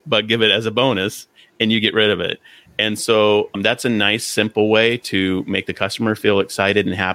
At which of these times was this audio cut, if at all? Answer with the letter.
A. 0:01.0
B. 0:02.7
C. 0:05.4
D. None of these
D